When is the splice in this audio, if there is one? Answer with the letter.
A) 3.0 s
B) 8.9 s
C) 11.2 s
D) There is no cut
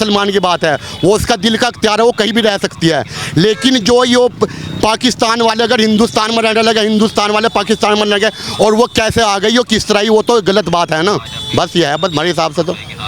D